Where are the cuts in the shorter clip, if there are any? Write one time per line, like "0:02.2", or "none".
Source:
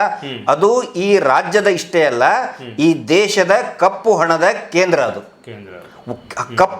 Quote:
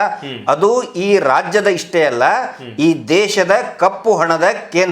none